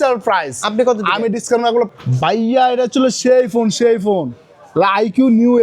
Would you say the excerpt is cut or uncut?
cut